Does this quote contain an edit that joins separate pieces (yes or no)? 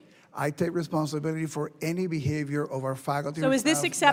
no